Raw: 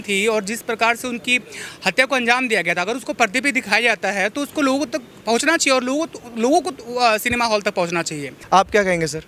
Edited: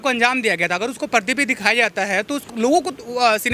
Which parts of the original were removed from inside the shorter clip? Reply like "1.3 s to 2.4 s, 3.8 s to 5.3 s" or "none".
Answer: 4.5 s to 6.2 s